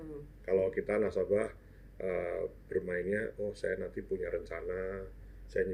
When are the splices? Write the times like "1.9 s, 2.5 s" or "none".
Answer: none